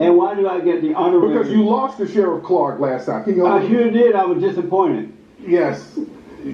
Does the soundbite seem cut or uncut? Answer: uncut